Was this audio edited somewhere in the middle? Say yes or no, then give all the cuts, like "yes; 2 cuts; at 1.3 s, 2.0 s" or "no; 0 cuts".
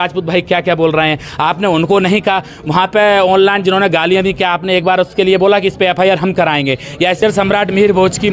yes; 1 cut; at 7.2 s